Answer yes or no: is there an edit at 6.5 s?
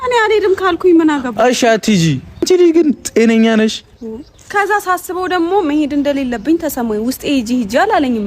no